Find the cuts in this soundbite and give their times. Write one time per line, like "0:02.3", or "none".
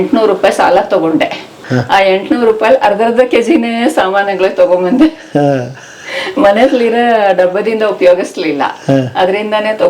0:01.6